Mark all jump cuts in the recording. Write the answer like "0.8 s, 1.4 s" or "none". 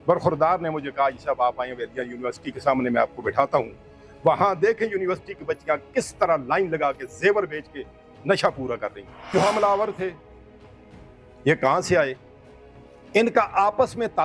9.1 s